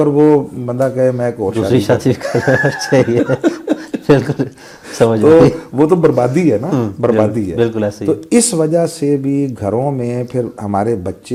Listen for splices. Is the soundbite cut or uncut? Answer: uncut